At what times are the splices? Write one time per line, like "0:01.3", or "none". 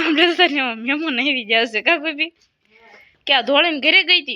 none